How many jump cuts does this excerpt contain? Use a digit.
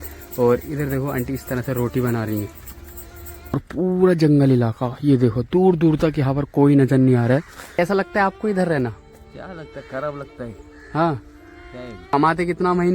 3